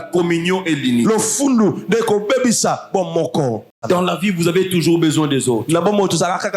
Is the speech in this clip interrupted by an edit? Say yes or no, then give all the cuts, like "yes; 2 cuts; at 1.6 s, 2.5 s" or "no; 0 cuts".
yes; 1 cut; at 3.7 s